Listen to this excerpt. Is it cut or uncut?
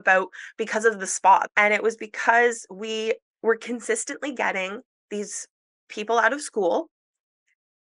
cut